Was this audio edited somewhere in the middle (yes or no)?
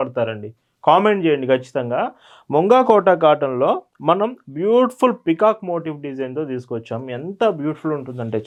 no